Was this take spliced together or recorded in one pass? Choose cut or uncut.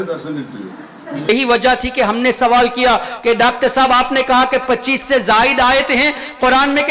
cut